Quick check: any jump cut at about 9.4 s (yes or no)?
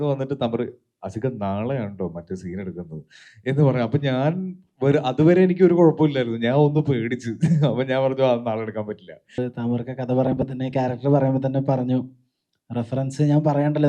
yes